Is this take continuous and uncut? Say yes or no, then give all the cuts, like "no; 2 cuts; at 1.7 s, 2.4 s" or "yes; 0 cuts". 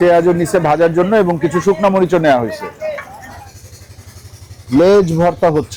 yes; 0 cuts